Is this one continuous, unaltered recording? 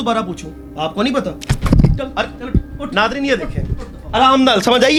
yes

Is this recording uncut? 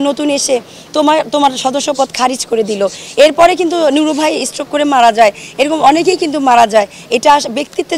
yes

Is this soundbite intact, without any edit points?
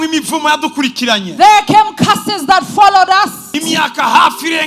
no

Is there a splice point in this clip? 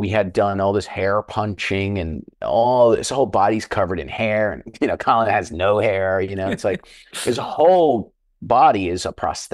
no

